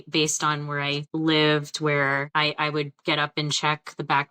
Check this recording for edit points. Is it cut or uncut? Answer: cut